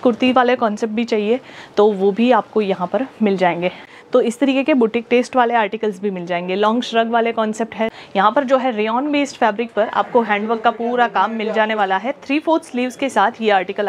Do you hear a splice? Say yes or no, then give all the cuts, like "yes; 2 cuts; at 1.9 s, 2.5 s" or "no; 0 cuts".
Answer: yes; 2 cuts; at 3.8 s, 7.9 s